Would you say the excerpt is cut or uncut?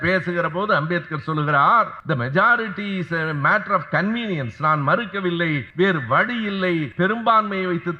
cut